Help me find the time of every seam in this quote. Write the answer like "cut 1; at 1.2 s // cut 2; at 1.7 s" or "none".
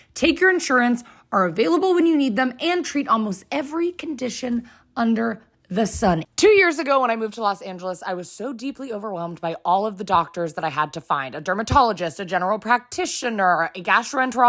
cut 1; at 6.2 s